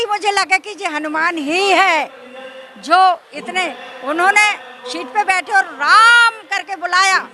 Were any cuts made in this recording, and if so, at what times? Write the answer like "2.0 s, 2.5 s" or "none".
none